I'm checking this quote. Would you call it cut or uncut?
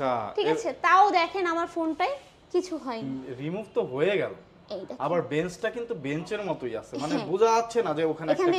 cut